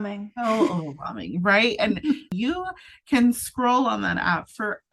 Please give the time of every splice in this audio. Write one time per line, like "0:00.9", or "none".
0:02.3